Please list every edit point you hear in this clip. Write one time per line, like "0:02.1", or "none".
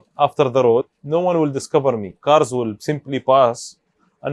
0:01.0
0:02.1